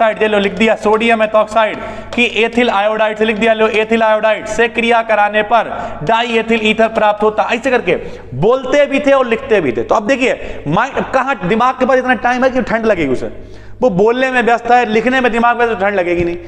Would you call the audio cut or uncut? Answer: uncut